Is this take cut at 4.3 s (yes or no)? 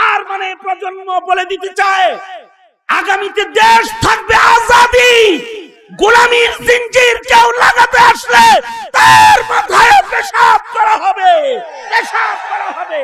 no